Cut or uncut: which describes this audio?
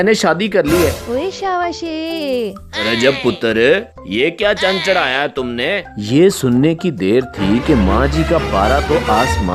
cut